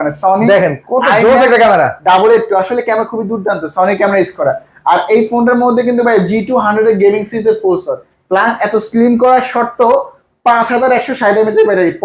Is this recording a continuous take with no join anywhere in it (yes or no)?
yes